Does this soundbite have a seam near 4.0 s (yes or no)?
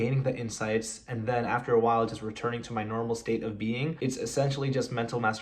yes